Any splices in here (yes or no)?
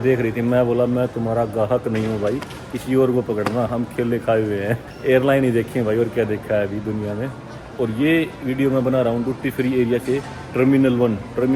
no